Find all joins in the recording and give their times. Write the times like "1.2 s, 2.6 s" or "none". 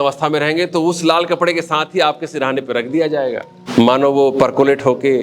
3.6 s